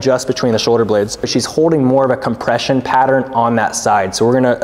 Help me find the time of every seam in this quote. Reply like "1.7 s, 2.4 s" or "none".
1.3 s